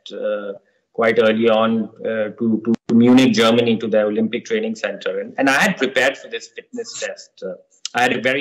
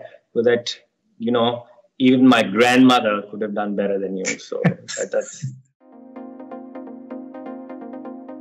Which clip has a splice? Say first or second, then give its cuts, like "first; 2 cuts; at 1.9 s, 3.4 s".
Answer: second; 1 cut; at 5.9 s